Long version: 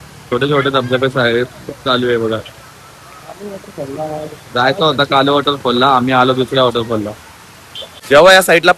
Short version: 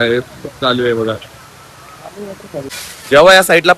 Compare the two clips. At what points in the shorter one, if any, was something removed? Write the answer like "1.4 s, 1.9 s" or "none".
2.6 s